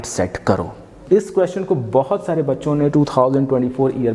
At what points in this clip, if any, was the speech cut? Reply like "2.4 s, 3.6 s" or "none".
0.9 s